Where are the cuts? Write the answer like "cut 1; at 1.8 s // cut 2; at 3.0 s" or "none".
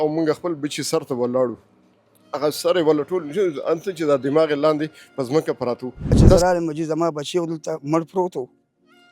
cut 1; at 6.4 s